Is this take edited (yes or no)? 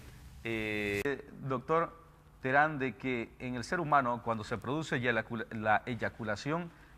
yes